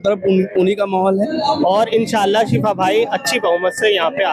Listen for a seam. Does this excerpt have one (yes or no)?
yes